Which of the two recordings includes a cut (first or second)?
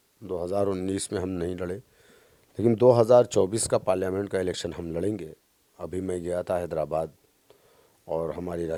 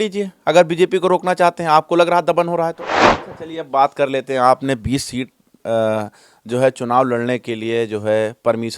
second